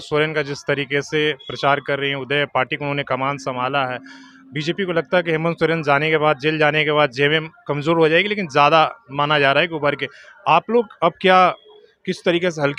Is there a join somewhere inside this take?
no; 0 cuts

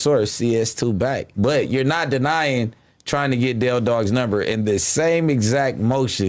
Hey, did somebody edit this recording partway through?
yes; 1 cut; at 1.3 s

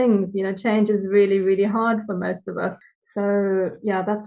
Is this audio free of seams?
no; 1 cut; at 2.8 s

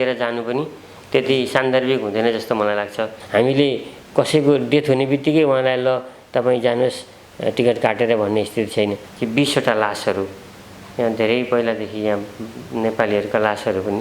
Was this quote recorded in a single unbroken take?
no; 2 cuts; at 3.1 s, 9.1 s

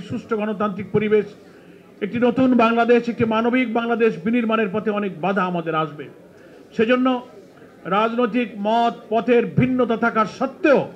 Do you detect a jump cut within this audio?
no; 0 cuts

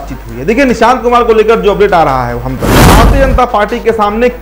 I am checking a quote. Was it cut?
yes; 1 cut; at 3.0 s

